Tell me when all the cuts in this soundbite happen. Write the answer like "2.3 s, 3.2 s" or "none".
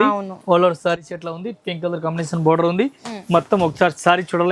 none